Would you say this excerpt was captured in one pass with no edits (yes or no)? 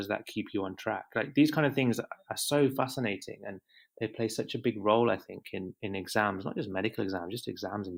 yes